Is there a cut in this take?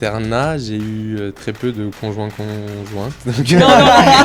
no; 0 cuts

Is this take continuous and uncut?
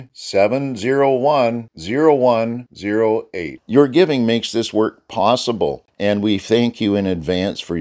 no; 1 cut; at 5.9 s

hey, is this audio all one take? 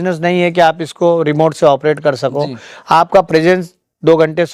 yes; 0 cuts

